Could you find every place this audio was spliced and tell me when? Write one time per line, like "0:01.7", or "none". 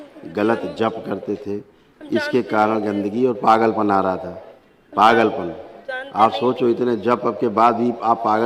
none